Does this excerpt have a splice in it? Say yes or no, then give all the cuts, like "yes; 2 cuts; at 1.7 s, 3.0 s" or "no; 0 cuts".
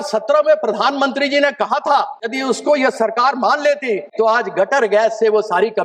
yes; 2 cuts; at 2.3 s, 4.1 s